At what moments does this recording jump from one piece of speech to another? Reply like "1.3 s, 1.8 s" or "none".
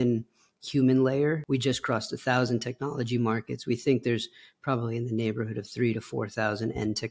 1.4 s